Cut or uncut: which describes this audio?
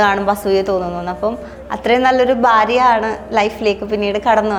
uncut